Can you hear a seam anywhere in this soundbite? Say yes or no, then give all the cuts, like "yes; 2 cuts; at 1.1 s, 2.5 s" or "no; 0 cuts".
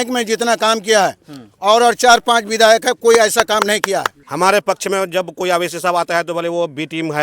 yes; 1 cut; at 4.2 s